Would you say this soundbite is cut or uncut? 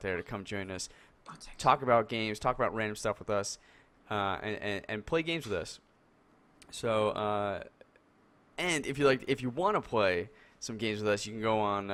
uncut